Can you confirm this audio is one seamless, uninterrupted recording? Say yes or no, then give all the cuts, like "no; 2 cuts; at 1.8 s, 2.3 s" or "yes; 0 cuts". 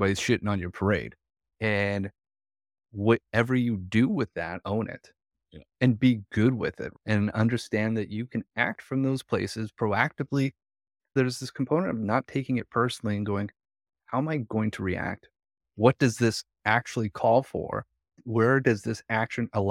no; 1 cut; at 4.6 s